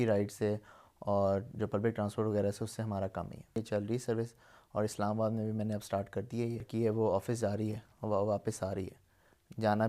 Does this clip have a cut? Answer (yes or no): yes